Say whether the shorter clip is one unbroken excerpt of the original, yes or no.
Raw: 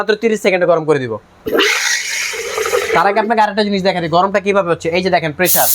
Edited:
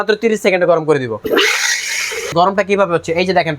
no